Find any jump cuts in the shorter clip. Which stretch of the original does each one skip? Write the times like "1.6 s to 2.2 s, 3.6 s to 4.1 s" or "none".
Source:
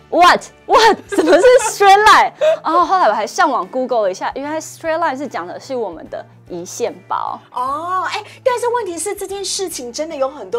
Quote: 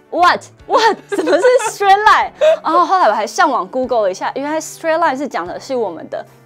none